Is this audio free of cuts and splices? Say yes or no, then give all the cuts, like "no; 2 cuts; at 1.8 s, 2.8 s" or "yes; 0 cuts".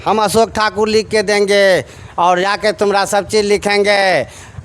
yes; 0 cuts